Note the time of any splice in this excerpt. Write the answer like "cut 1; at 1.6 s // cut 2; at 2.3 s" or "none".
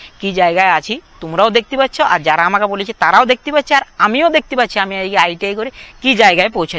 none